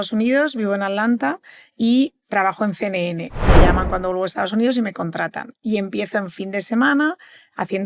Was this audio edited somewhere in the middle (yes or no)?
yes